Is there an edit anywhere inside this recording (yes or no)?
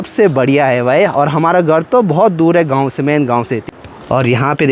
yes